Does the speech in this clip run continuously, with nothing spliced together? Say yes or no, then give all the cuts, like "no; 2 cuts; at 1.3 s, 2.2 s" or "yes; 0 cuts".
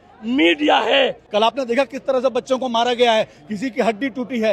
no; 1 cut; at 1.2 s